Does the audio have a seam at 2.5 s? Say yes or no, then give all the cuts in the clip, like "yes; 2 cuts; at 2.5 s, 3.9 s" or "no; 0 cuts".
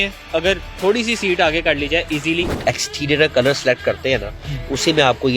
yes; 1 cut; at 2.5 s